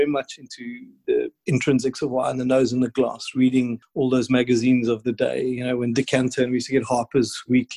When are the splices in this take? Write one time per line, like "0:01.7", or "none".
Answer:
0:01.0
0:03.8